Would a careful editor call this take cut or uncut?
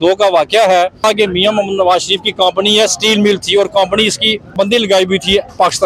cut